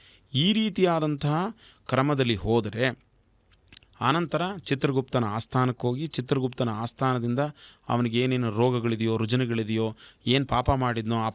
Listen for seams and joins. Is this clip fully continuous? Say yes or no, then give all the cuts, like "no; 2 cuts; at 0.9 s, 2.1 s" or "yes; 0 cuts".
yes; 0 cuts